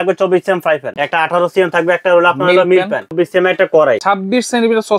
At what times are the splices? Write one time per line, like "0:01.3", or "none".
0:01.0
0:03.1
0:04.0